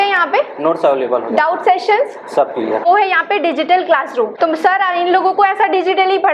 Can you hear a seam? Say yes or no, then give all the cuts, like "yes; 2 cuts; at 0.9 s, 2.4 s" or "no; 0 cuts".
yes; 2 cuts; at 2.8 s, 4.3 s